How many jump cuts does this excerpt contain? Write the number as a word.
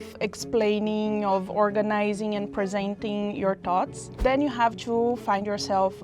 one